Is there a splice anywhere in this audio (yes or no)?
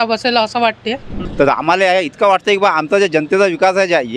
yes